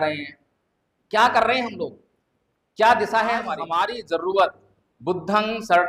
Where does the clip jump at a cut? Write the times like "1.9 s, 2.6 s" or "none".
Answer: 3.6 s